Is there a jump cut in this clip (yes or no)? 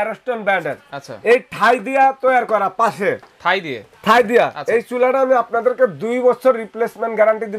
no